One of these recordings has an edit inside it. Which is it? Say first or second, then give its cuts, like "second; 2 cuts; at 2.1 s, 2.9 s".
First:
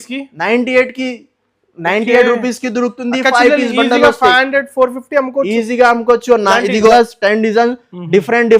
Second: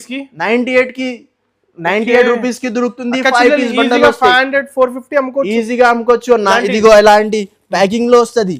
first; 1 cut; at 6.9 s